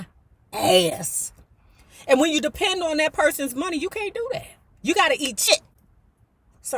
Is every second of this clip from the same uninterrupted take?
no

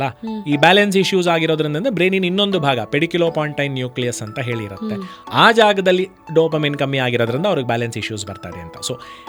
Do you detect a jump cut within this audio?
no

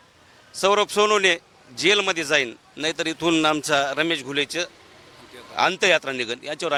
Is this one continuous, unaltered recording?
yes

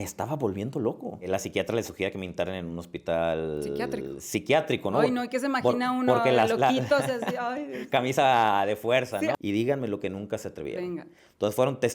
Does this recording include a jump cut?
yes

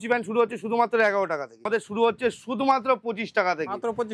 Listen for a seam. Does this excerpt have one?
yes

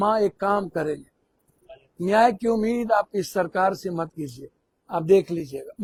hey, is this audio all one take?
yes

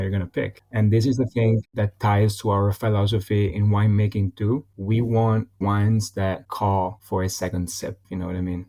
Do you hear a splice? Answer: no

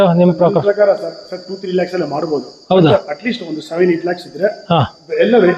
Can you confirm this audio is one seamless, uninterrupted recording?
yes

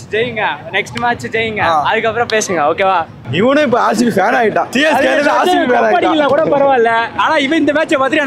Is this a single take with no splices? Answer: no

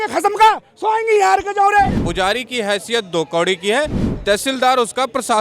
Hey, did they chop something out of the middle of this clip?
yes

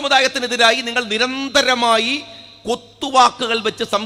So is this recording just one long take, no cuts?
yes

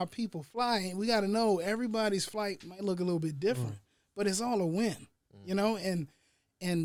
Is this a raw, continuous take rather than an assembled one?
yes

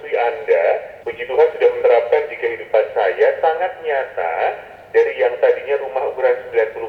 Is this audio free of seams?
no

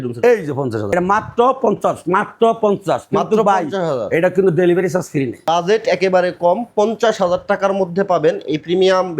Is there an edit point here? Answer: yes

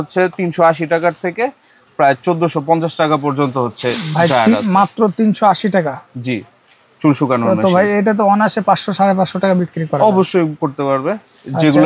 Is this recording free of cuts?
yes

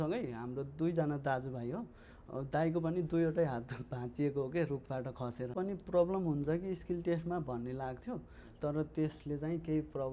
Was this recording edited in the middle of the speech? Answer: yes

